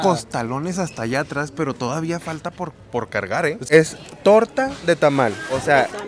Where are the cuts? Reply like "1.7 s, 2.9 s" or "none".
3.7 s

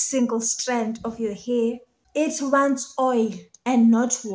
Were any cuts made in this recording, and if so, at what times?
1.9 s

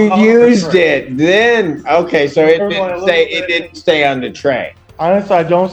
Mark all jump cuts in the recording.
4.8 s

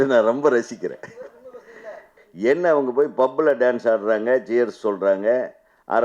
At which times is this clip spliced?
2.1 s

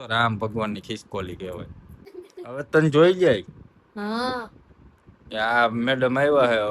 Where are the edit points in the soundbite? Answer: 2.1 s

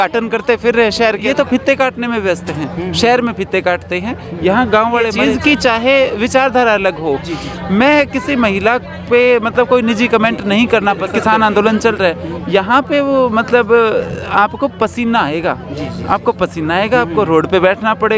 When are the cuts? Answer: 1.2 s, 5.1 s, 11.1 s

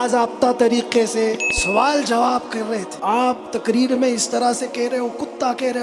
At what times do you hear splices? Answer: 1.5 s, 2.9 s

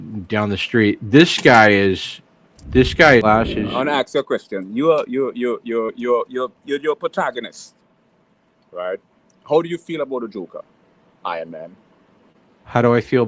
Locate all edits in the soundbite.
3.2 s

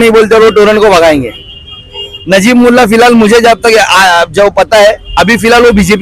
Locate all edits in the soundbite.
none

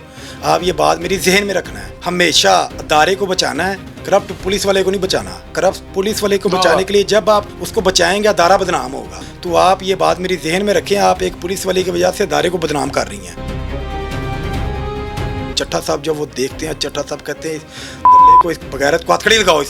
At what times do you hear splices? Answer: 15.5 s

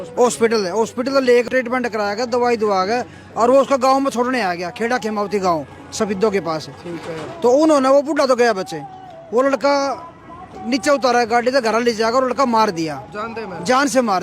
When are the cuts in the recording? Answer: 1.5 s

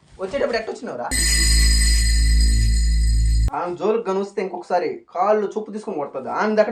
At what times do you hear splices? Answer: none

